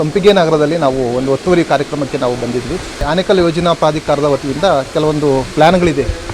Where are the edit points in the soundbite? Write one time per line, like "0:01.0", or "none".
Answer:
0:03.0